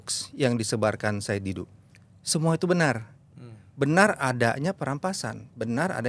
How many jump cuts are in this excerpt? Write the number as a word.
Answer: zero